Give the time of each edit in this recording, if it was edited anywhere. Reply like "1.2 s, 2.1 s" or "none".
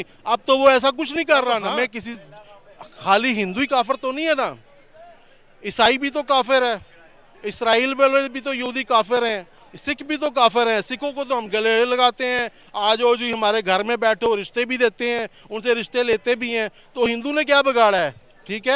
1.1 s